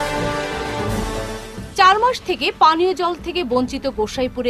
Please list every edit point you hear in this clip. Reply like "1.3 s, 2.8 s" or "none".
1.1 s